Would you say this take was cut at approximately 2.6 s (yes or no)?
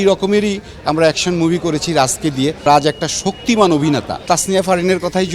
yes